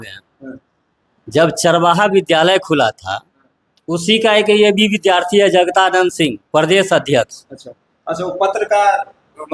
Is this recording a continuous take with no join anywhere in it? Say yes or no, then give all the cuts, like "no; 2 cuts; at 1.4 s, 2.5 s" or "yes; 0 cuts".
yes; 0 cuts